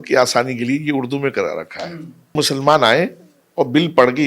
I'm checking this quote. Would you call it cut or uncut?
cut